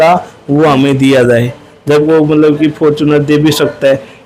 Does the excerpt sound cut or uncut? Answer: cut